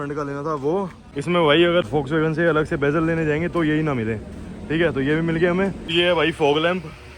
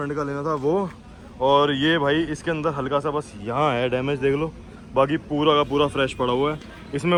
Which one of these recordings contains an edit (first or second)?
first